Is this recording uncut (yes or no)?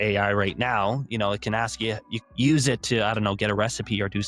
no